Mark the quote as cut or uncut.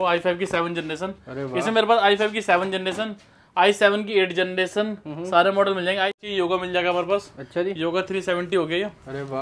cut